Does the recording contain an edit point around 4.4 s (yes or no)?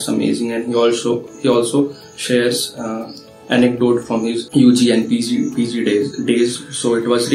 yes